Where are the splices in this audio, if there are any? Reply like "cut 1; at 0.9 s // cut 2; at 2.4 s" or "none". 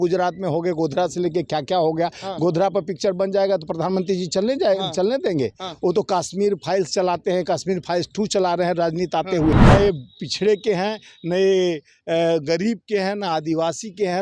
cut 1; at 9.6 s